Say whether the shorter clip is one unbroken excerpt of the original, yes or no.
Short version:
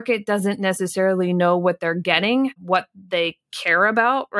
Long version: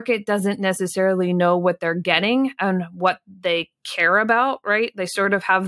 no